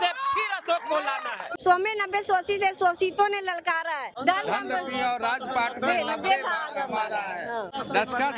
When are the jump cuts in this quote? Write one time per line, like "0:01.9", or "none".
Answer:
0:01.6
0:04.1